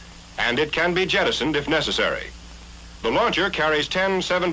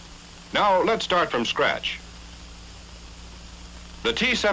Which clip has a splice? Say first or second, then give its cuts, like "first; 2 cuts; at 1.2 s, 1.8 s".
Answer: first; 1 cut; at 1.7 s